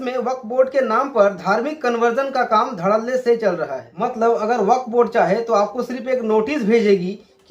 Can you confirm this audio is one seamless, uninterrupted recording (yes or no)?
no